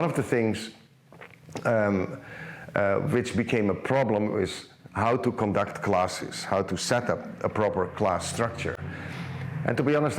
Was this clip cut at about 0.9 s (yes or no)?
no